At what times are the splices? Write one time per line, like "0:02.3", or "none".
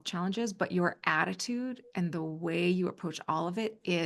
none